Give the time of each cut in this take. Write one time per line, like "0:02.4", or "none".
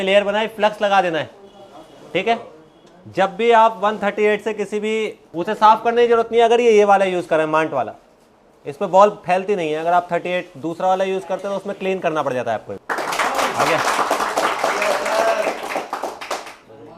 0:12.8